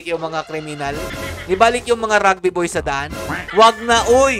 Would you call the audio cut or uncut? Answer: cut